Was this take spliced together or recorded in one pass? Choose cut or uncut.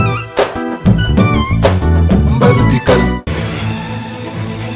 cut